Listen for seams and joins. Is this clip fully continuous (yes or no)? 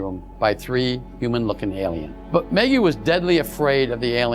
no